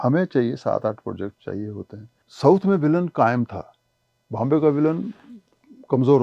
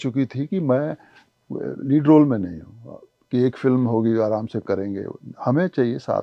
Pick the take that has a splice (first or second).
first